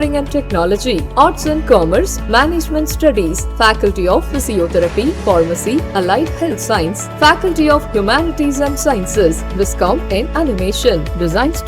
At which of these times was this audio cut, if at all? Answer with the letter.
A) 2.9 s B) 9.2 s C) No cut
C